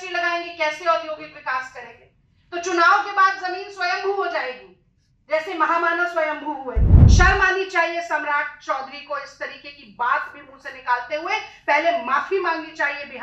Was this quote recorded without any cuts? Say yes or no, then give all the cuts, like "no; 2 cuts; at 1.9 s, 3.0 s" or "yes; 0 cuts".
no; 1 cut; at 6.9 s